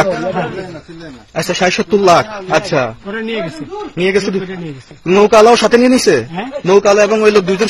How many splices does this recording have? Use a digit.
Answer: 0